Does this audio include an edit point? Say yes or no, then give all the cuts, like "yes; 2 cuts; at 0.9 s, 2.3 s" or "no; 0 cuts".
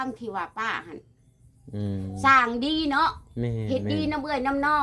no; 0 cuts